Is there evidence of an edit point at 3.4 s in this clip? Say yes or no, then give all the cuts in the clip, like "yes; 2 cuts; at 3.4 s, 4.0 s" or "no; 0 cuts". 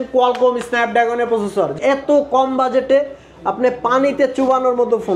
no; 1 cut; at 1.7 s